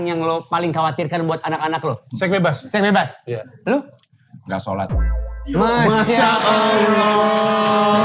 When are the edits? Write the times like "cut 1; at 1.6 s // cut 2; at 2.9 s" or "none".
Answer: cut 1; at 2.1 s